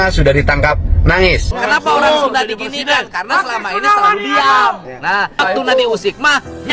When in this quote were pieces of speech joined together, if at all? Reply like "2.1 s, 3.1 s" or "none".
1.5 s, 5.4 s